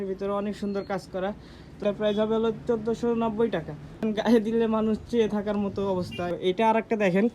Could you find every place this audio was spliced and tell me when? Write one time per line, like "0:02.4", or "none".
0:01.8
0:03.9
0:06.3